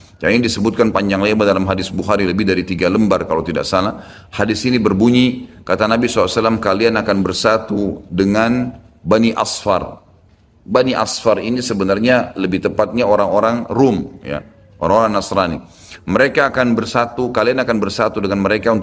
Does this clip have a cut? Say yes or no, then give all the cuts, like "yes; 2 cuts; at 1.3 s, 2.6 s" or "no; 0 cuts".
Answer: no; 0 cuts